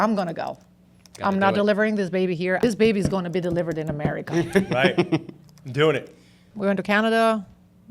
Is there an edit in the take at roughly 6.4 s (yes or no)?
yes